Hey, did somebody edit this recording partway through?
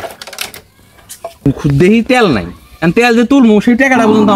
yes; 1 cut; at 1.4 s

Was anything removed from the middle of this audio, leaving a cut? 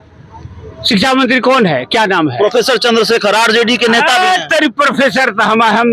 no; 0 cuts

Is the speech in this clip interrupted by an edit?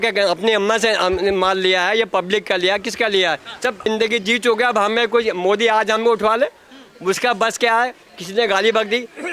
yes; 1 cut; at 3.9 s

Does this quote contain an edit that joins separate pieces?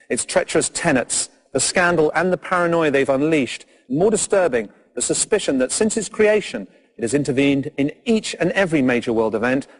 yes; 1 cut; at 8.6 s

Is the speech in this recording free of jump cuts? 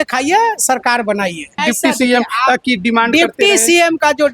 no; 1 cut; at 1.6 s

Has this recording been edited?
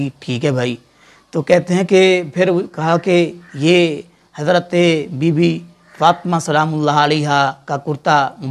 yes; 1 cut; at 3.4 s

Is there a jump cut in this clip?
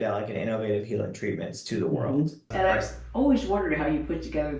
yes; 1 cut; at 2.5 s

